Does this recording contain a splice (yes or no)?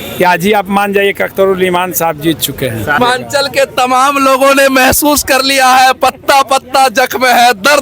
yes